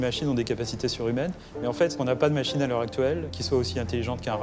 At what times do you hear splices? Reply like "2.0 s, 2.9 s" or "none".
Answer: 1.9 s, 3.3 s

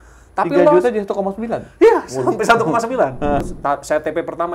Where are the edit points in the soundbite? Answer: 3.4 s

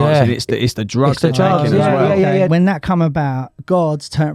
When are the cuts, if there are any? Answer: 2.5 s

